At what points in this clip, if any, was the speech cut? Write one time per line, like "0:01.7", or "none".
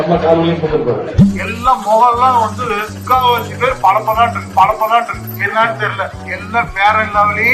0:01.0